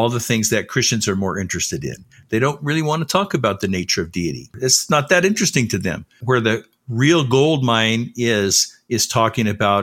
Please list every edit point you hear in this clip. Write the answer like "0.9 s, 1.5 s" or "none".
4.5 s, 6.2 s